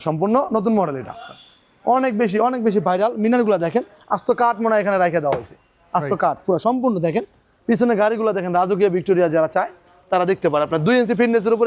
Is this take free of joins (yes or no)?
yes